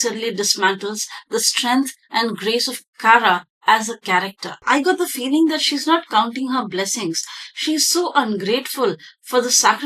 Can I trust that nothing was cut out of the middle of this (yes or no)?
no